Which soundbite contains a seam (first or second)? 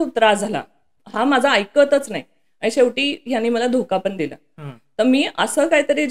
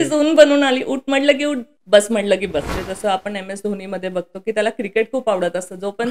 second